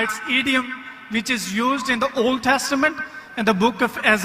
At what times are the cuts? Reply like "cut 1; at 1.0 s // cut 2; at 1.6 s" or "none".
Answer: none

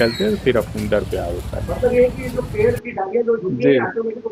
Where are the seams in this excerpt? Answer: none

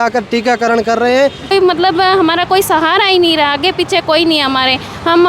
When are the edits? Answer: cut 1; at 1.5 s

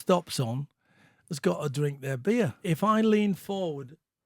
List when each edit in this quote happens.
cut 1; at 2.6 s

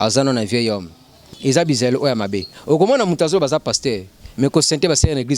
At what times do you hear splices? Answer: cut 1; at 1.2 s

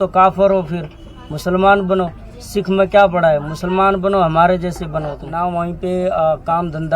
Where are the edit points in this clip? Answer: cut 1; at 5.2 s

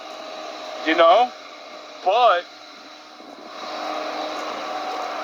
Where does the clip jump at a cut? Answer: none

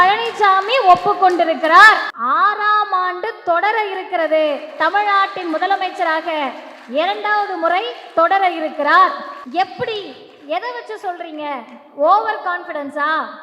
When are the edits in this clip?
cut 1; at 2.1 s // cut 2; at 9.3 s

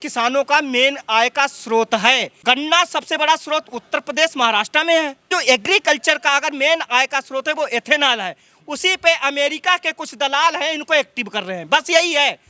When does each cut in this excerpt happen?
cut 1; at 2.3 s // cut 2; at 5.3 s

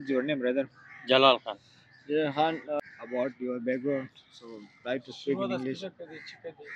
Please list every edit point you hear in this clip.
cut 1; at 2.8 s

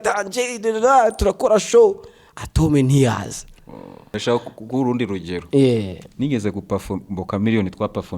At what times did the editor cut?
cut 1; at 4.1 s

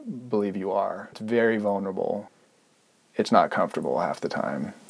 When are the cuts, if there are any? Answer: cut 1; at 1.2 s // cut 2; at 2.3 s

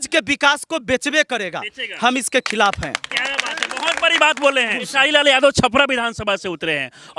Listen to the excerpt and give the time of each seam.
cut 1; at 4.9 s

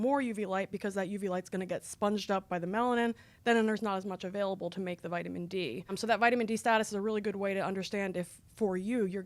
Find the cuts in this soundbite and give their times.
cut 1; at 6.0 s

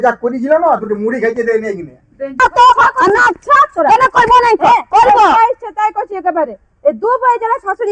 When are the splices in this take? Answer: cut 1; at 2.4 s

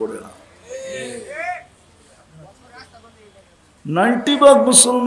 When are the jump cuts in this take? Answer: none

